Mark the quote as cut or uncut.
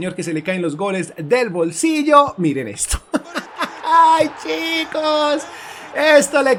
uncut